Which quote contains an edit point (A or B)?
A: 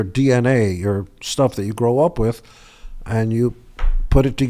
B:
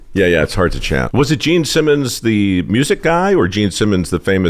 B